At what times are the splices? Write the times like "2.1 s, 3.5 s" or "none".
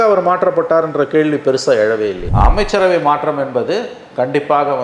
2.2 s